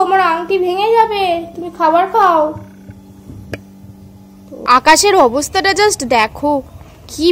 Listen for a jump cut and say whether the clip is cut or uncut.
cut